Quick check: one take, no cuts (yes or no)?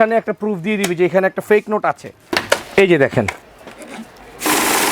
no